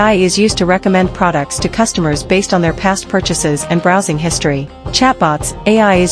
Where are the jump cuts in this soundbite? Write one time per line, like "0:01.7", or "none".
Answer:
0:04.8